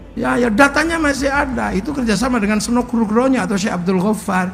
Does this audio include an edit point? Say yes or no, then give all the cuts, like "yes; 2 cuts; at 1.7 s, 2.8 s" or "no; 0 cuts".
no; 0 cuts